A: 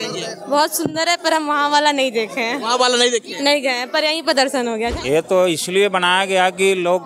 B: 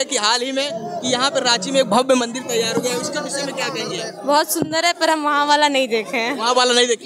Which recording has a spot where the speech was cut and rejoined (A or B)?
A